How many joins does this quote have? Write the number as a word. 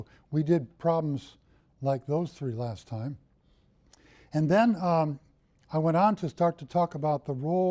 one